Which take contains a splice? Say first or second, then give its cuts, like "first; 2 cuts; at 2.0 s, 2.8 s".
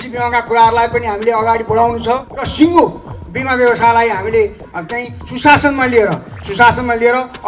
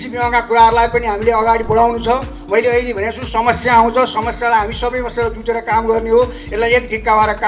first; 1 cut; at 2.3 s